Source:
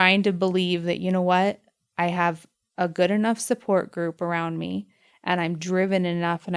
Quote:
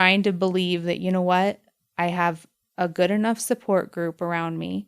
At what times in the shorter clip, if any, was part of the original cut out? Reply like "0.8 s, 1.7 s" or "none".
none